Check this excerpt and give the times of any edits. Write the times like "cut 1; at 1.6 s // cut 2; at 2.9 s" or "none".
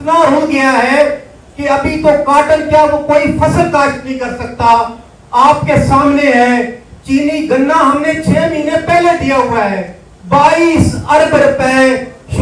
none